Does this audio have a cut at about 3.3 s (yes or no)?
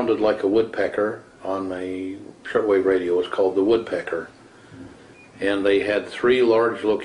yes